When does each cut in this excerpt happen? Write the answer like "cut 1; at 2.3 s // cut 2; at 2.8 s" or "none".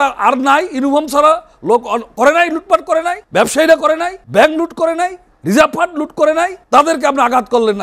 cut 1; at 3.2 s // cut 2; at 4.2 s // cut 3; at 5.3 s // cut 4; at 6.6 s